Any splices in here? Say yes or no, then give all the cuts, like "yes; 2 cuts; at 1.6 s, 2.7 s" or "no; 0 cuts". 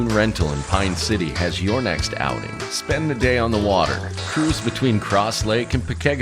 no; 0 cuts